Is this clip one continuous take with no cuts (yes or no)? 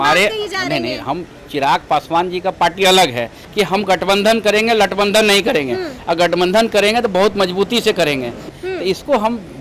no